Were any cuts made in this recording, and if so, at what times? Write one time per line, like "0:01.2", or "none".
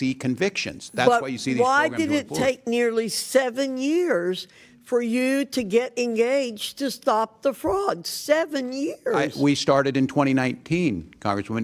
none

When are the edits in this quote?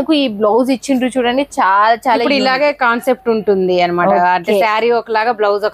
none

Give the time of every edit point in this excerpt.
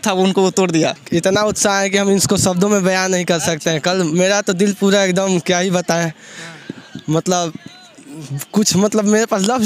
0:01.0

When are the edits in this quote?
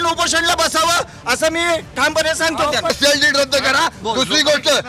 0:02.9

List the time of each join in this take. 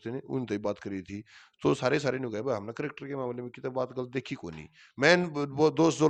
none

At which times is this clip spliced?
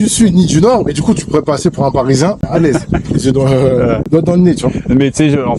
0:02.4
0:04.0

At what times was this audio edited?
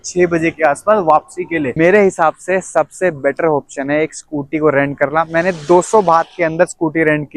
0:01.7

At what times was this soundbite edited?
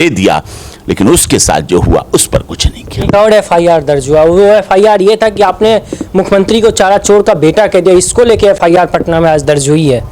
none

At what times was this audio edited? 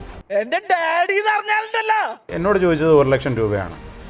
0:02.3

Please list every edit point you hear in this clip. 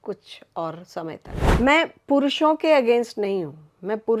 0:01.4

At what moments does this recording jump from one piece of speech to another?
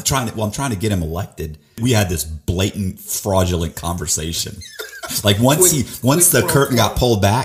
0:01.8

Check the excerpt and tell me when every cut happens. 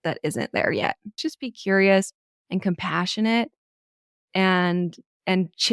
0:01.2

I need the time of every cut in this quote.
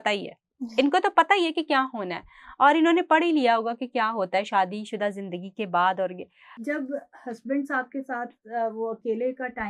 0:06.6

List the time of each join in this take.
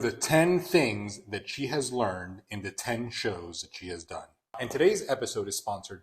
0:04.6

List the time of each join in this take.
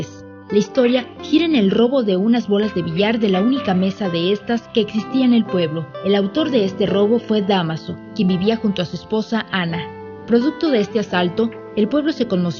none

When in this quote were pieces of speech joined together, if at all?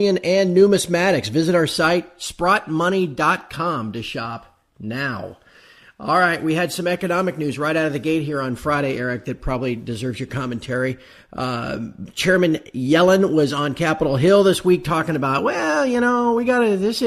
0:14.7

